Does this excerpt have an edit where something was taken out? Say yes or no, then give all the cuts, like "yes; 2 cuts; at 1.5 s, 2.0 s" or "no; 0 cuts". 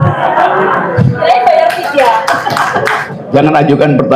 yes; 1 cut; at 3.1 s